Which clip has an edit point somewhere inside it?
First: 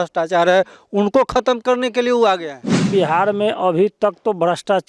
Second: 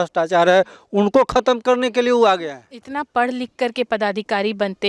first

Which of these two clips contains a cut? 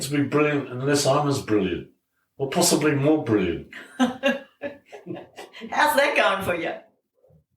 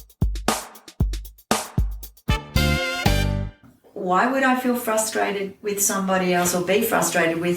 second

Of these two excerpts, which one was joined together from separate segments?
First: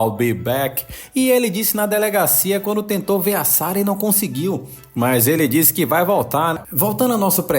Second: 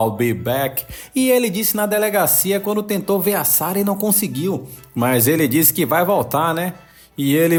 first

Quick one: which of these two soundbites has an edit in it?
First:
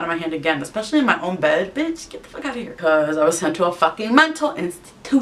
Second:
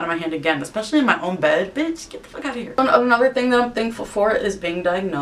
first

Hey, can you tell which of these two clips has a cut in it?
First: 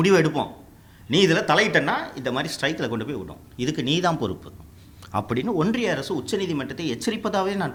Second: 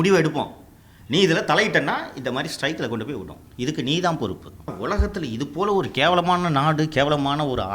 second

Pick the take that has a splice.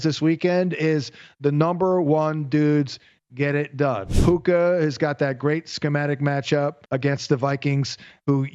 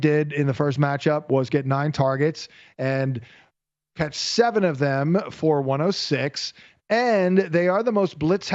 first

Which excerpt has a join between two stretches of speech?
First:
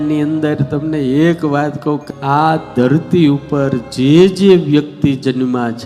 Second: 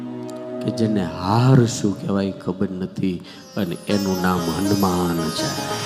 first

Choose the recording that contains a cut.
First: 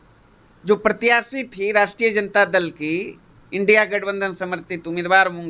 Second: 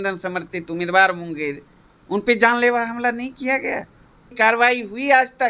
second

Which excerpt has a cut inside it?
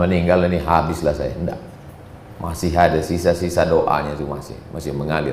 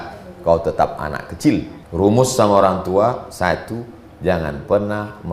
second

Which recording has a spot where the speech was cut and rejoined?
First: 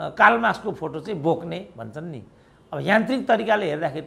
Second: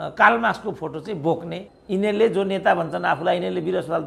second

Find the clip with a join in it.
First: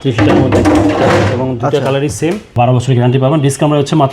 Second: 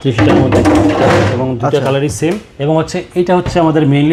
first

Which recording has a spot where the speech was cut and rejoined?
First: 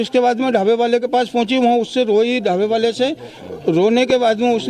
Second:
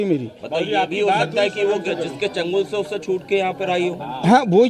first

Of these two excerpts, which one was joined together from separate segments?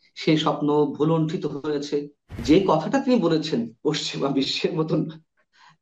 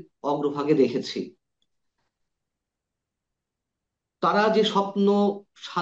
first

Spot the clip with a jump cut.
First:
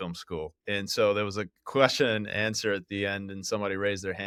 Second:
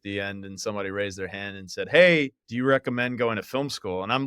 second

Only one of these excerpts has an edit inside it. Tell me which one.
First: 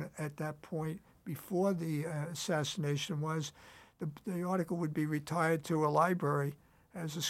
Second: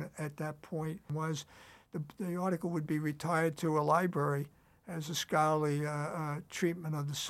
second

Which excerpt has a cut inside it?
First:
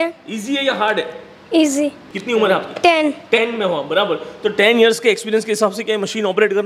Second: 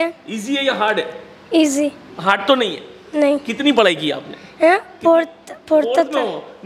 first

